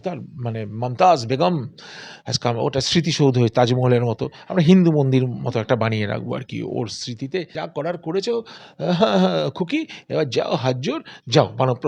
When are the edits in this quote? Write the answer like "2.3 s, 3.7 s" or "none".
7.5 s